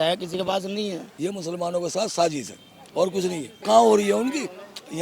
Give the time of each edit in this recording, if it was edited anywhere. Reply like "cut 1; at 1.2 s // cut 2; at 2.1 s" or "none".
cut 1; at 1.1 s // cut 2; at 3.5 s